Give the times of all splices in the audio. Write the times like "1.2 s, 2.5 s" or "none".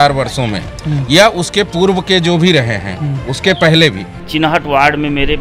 4.1 s